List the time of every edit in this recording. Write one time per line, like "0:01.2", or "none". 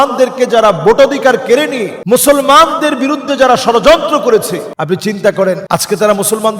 0:01.9
0:04.7
0:05.6